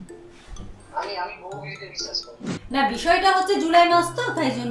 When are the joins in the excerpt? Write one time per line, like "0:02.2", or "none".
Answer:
0:02.4